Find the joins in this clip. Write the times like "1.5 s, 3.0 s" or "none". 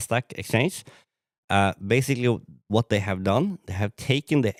none